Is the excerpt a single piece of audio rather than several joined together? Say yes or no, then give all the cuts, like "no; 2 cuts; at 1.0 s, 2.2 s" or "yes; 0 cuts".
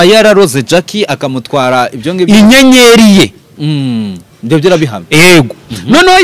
yes; 0 cuts